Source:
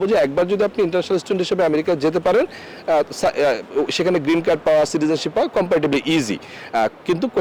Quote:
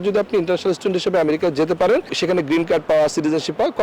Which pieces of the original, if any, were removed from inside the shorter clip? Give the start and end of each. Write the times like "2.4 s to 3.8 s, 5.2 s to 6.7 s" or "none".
2.6 s to 3.9 s

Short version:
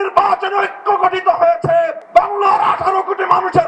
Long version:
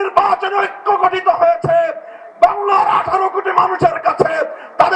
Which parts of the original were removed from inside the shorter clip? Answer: 2.0 s to 2.3 s

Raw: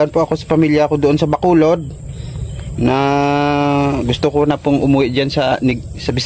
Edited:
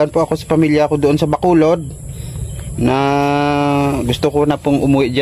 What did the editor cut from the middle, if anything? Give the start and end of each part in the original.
none

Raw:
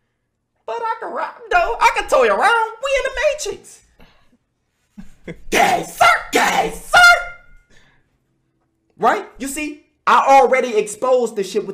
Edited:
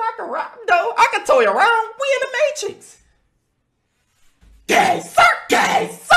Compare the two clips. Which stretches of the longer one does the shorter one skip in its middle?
none

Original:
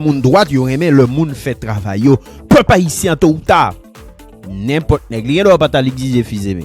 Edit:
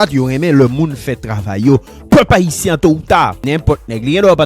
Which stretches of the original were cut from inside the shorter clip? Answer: 3.8 s to 4.6 s

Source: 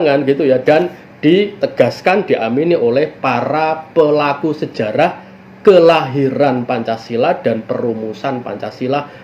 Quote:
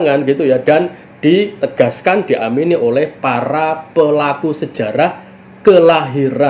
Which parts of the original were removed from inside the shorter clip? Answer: none

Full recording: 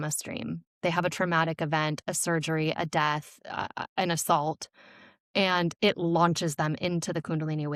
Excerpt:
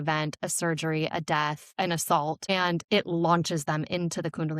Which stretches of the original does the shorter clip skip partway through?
3.3 s to 3.8 s, 4.7 s to 5.4 s

